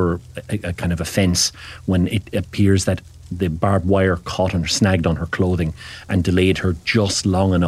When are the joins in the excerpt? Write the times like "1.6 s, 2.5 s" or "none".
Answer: none